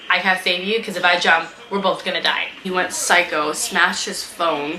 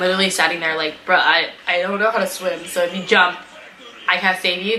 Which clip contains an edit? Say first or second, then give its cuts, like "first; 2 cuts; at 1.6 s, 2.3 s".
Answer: first; 1 cut; at 2.6 s